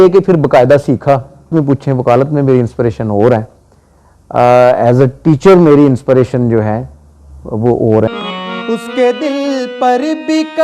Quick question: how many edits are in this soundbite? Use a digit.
2